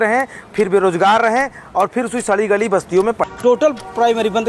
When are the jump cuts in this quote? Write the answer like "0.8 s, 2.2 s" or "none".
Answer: 3.2 s